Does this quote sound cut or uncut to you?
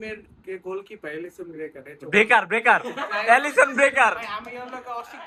uncut